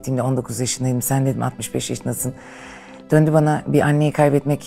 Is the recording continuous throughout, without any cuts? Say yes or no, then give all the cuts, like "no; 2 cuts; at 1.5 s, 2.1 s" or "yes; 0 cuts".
yes; 0 cuts